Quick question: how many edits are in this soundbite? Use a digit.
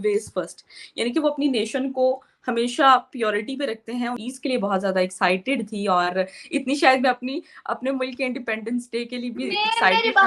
1